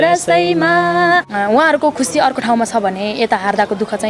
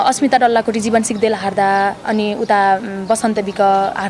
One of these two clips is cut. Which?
first; 1 cut; at 1.3 s

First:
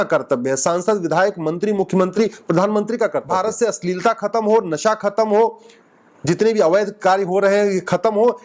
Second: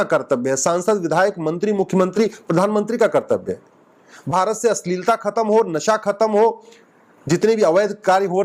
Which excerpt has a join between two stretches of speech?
first; 1 cut; at 3.3 s

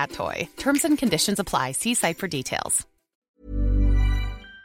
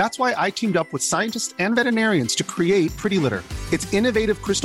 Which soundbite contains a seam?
first; 1 cut; at 3.1 s

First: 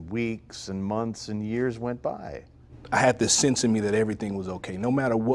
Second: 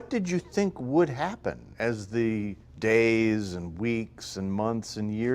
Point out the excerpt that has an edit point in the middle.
second; 2 cuts; at 1.7 s, 2.6 s

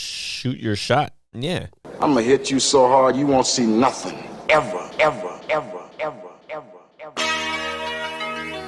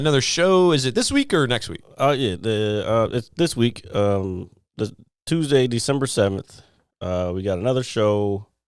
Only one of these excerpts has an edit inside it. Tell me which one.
first; 1 cut; at 1.8 s

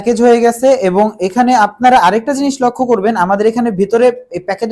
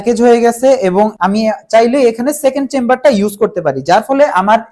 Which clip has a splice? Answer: second; 1 cut; at 1.1 s

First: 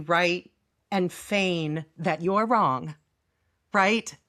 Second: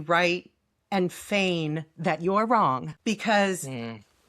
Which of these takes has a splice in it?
second; 1 cut; at 2.9 s

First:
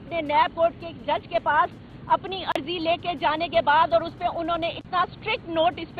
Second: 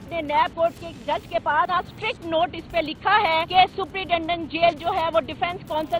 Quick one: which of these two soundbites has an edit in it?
second; 2 cuts; at 1.7 s, 3.5 s

